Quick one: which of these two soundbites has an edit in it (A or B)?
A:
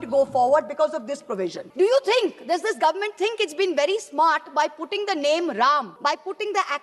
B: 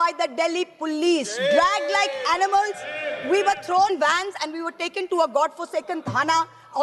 A